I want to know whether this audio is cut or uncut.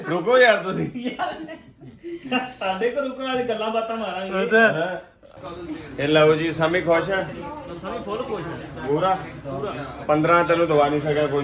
cut